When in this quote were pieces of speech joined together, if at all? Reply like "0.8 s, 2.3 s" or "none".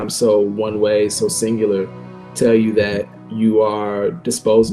3.2 s

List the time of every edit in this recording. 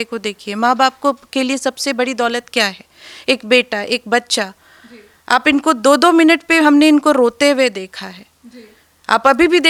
none

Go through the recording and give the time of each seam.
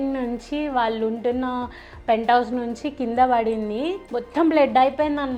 none

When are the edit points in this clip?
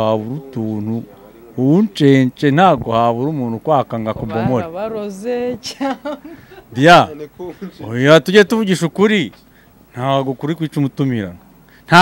none

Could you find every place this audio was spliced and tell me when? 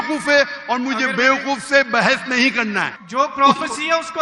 2.9 s

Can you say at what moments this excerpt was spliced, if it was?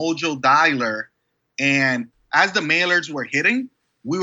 2.1 s

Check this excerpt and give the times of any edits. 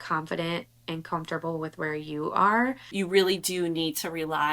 2.9 s

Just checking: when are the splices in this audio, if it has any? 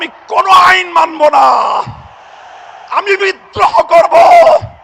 none

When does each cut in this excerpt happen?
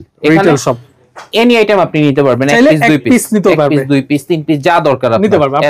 none

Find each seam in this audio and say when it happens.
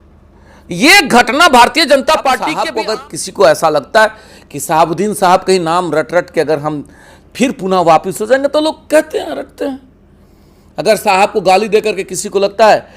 2.5 s

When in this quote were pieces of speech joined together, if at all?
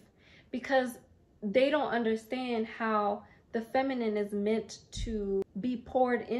5.5 s

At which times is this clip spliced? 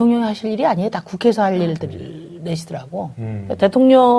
2.6 s

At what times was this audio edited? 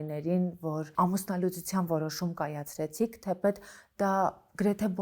none

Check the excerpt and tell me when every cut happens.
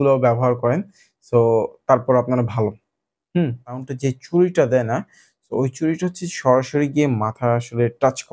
3.8 s

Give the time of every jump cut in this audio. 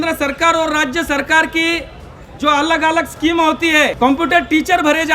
3.9 s

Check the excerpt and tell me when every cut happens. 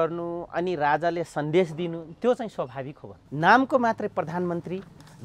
3.2 s

